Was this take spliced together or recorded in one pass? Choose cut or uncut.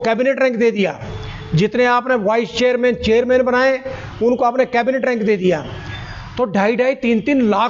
uncut